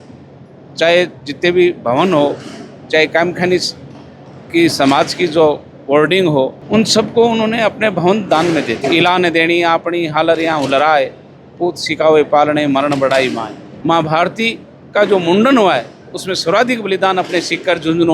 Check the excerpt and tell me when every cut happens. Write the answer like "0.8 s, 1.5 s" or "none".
8.8 s, 13.7 s

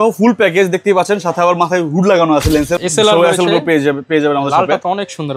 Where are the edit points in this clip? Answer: 2.7 s

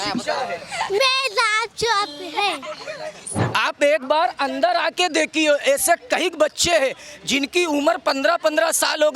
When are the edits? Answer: 3.4 s

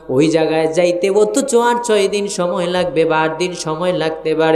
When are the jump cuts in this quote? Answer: none

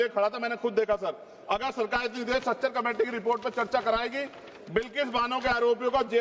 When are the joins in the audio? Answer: none

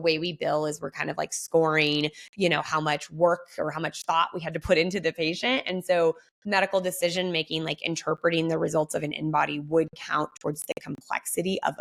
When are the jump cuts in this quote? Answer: none

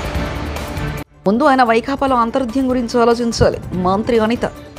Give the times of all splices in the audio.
1.1 s

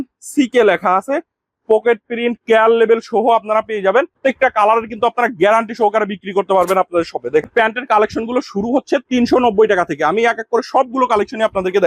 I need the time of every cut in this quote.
4.2 s, 7.5 s

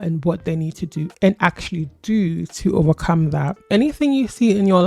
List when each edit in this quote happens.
3.5 s

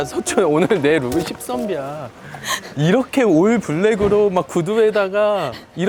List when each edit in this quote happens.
none

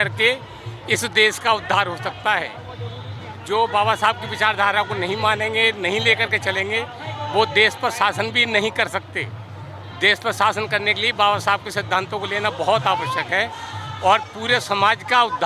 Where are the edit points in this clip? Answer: none

